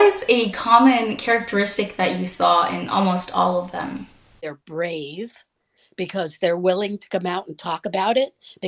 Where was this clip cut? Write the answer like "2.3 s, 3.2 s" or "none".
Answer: 4.5 s